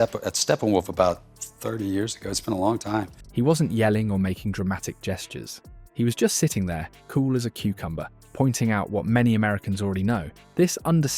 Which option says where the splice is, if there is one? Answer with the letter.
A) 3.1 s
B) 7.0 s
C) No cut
C